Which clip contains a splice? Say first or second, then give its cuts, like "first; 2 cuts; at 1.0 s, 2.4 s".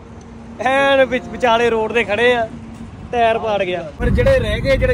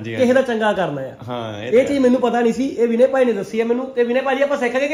first; 1 cut; at 4.0 s